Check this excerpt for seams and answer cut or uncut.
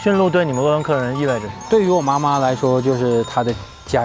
cut